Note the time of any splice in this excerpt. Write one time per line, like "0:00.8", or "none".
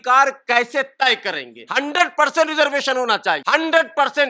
0:01.6
0:03.4